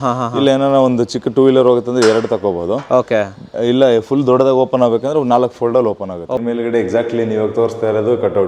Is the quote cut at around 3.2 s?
no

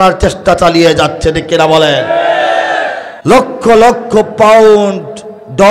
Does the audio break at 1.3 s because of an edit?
no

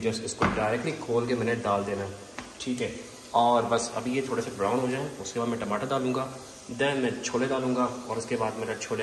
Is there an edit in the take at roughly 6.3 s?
no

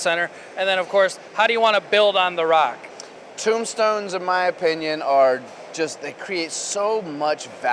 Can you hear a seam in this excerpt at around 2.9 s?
yes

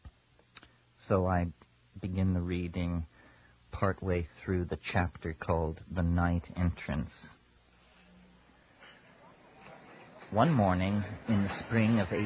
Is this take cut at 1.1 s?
yes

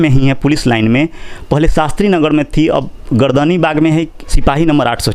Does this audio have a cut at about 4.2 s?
yes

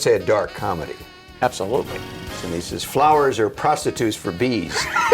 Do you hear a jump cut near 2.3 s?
yes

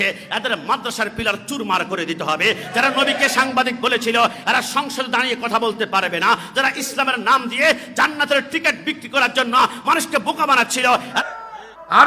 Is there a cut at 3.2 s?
no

